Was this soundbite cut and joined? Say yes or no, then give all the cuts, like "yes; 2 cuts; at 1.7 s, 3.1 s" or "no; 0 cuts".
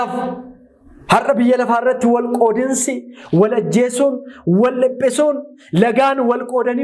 no; 0 cuts